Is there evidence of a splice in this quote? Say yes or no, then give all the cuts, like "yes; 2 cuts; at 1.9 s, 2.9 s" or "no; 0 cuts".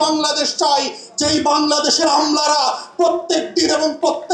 no; 0 cuts